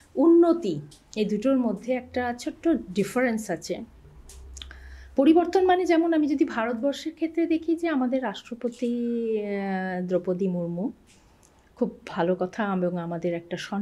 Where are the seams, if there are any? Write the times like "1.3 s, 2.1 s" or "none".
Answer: none